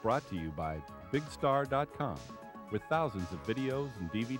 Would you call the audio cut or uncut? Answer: uncut